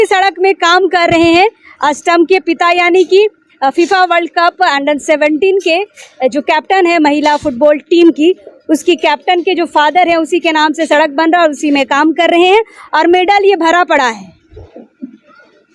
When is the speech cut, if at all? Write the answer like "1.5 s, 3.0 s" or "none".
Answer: none